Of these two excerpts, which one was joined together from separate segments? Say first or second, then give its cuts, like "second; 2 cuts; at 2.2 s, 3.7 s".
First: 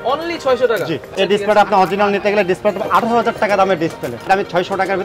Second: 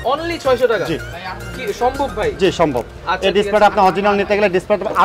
first; 2 cuts; at 1.1 s, 4.2 s